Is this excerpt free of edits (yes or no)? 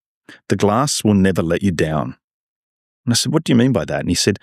yes